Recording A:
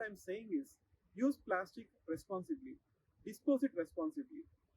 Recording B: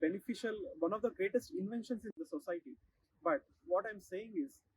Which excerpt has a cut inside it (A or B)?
B